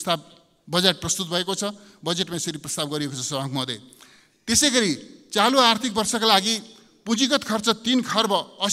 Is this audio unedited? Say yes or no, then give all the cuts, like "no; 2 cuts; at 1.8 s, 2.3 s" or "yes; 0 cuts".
yes; 0 cuts